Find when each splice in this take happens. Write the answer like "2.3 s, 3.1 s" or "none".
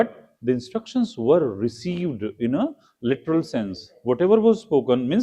none